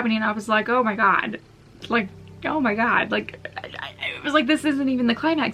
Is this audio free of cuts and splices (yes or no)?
yes